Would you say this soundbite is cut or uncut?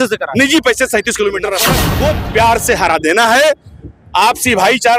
cut